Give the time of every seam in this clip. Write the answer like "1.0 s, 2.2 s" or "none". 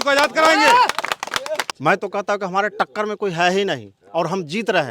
1.7 s